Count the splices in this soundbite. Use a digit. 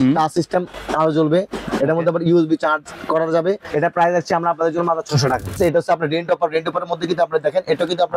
2